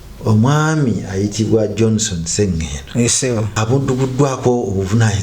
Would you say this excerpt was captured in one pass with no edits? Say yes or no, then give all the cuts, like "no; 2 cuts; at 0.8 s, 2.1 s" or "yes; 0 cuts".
no; 1 cut; at 3.5 s